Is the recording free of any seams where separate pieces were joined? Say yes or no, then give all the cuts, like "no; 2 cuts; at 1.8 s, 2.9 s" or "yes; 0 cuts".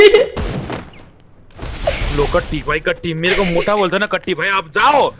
yes; 0 cuts